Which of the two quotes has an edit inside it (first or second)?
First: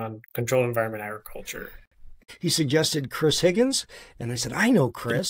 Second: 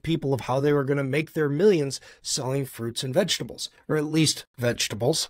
first